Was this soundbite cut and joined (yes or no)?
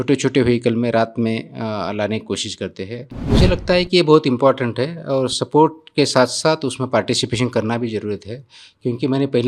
yes